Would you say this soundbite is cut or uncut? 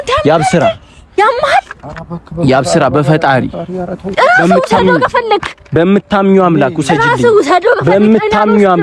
uncut